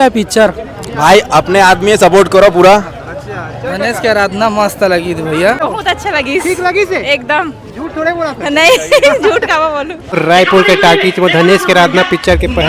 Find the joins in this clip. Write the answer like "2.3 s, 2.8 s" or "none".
5.6 s, 10.2 s